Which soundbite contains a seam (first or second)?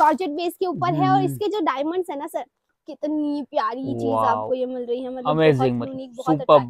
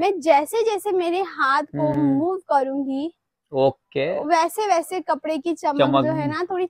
first